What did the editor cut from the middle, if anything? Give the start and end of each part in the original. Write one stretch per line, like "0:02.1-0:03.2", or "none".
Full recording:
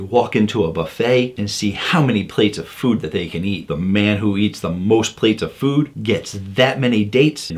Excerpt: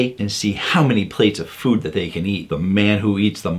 none